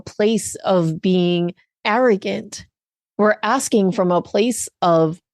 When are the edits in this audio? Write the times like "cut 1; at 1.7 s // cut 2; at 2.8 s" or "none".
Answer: cut 1; at 1.7 s